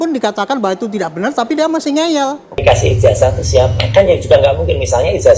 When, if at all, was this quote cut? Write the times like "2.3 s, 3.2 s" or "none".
2.6 s